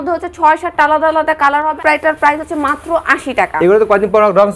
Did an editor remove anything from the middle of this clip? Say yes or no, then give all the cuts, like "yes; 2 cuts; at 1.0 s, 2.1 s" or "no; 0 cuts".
yes; 1 cut; at 1.8 s